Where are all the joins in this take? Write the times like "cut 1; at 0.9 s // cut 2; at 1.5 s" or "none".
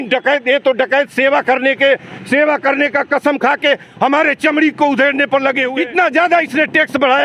cut 1; at 5.7 s